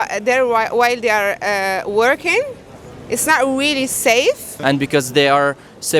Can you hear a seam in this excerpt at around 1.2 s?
no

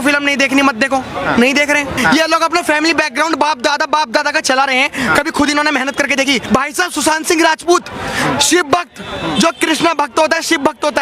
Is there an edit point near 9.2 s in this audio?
no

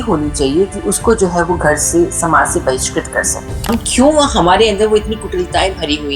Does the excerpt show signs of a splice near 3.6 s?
yes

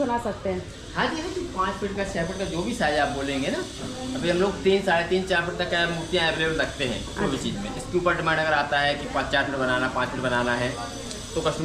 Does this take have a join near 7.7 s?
no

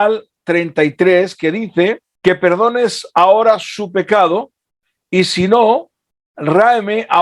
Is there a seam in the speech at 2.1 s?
yes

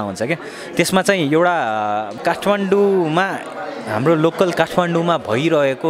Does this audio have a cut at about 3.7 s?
no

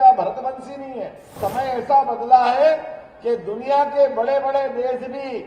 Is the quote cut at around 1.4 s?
yes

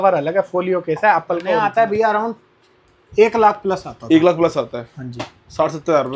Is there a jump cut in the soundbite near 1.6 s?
yes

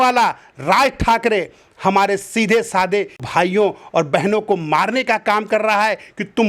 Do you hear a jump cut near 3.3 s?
yes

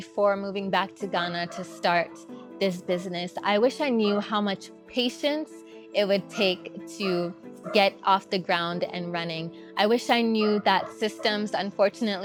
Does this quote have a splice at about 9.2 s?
no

